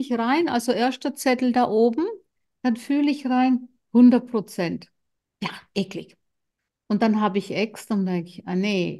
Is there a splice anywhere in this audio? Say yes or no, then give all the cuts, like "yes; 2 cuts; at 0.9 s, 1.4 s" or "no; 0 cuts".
no; 0 cuts